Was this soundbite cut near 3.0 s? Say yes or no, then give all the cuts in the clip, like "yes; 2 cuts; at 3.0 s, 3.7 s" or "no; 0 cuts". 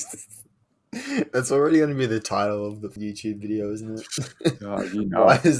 yes; 1 cut; at 3.0 s